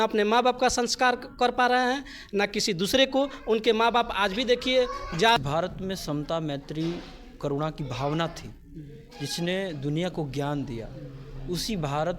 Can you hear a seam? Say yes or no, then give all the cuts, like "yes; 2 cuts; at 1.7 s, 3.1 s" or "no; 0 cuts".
yes; 1 cut; at 5.4 s